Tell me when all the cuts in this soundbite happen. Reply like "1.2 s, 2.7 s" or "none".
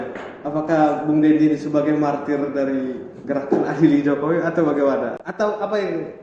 none